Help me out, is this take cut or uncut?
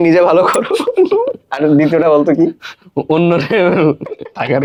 uncut